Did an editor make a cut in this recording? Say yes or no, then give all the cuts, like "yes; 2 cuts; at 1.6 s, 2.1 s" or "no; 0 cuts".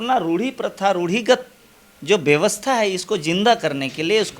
no; 0 cuts